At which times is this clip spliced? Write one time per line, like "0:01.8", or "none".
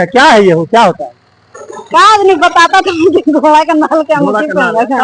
none